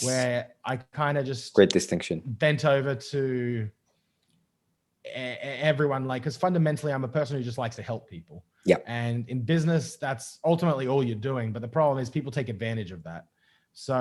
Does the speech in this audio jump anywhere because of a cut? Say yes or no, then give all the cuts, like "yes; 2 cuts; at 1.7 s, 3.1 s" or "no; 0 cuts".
no; 0 cuts